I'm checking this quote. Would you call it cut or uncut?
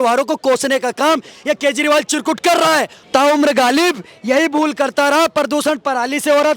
cut